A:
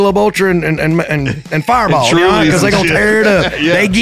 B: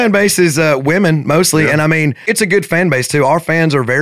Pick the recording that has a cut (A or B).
B